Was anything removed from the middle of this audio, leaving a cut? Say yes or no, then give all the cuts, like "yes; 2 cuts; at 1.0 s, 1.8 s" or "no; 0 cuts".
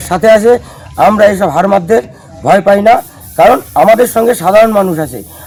no; 0 cuts